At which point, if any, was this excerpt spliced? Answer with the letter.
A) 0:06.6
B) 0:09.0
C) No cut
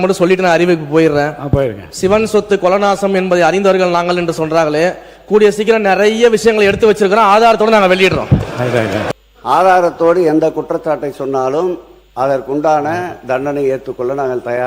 B